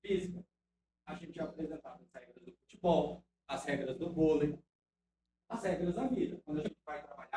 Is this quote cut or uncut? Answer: uncut